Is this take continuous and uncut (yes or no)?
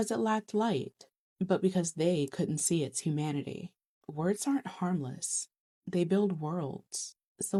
yes